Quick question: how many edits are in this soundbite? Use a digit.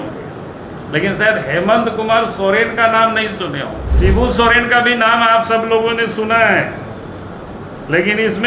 1